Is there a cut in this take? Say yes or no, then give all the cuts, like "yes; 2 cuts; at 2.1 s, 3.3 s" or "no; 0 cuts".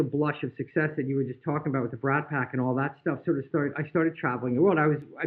no; 0 cuts